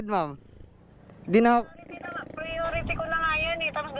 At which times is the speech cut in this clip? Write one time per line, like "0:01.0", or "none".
none